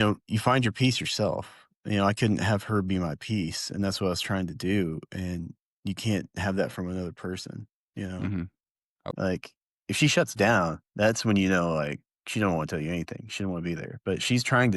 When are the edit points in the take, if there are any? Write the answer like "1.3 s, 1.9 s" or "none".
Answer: 9.0 s